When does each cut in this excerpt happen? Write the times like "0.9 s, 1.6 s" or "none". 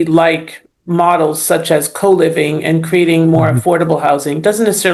none